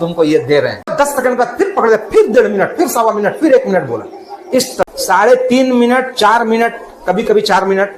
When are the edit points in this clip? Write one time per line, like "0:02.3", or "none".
0:00.9
0:04.8